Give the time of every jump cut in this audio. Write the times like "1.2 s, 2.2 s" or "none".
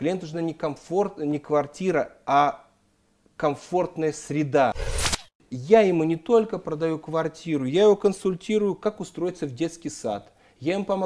5.1 s